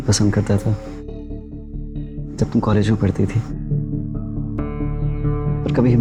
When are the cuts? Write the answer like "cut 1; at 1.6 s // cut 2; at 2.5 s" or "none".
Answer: none